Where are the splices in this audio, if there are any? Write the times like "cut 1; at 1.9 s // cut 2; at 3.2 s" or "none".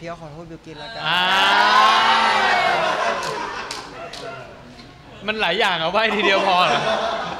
none